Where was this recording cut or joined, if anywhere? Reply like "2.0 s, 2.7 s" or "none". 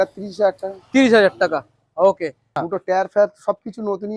2.5 s